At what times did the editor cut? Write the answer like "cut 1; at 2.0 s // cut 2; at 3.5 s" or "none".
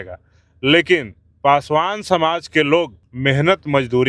cut 1; at 3.0 s

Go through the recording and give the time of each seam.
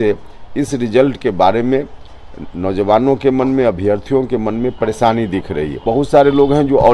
cut 1; at 5.8 s

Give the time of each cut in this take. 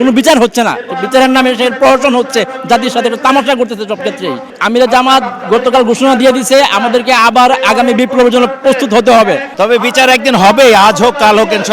none

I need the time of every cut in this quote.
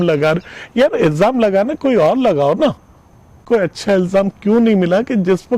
cut 1; at 3.5 s

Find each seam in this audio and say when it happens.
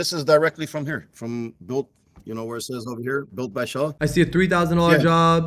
cut 1; at 4.0 s

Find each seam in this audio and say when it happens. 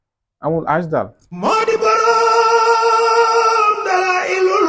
cut 1; at 1.3 s

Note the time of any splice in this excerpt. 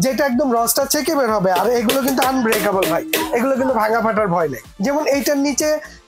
cut 1; at 4.7 s

